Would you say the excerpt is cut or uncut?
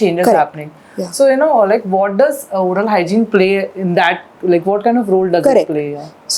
uncut